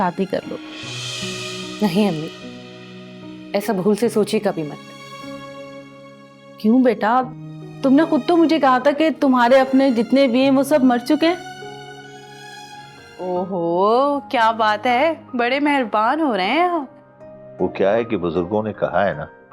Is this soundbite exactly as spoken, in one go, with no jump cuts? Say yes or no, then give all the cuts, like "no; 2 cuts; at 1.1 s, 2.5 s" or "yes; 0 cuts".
no; 1 cut; at 13.0 s